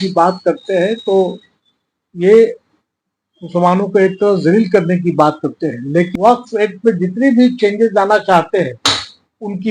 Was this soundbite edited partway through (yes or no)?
yes